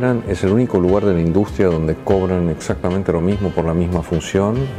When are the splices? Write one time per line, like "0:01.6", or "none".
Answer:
none